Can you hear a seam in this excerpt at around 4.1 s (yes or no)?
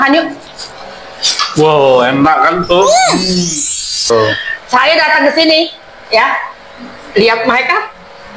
yes